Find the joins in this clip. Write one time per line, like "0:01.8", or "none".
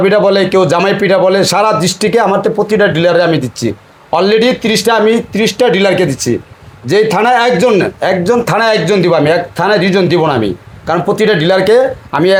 none